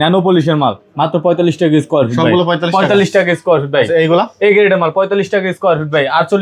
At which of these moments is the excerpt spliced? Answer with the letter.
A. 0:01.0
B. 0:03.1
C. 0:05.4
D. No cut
D